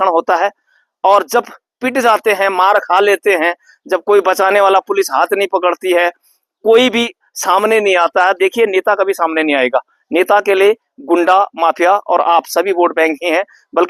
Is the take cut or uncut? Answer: uncut